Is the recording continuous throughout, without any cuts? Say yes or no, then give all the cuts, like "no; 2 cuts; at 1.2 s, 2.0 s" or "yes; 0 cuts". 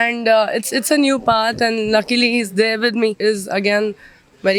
no; 1 cut; at 3.2 s